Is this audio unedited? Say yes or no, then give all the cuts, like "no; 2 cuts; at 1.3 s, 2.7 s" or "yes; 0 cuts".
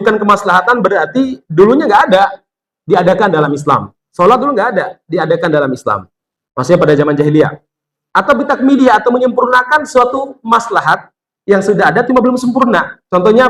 yes; 0 cuts